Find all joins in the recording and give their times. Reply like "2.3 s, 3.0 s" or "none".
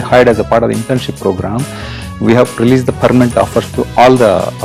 none